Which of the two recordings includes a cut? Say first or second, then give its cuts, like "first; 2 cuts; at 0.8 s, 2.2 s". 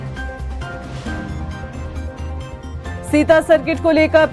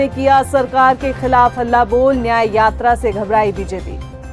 first; 1 cut; at 1.2 s